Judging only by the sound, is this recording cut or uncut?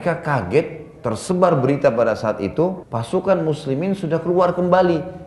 cut